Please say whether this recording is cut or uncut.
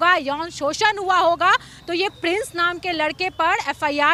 uncut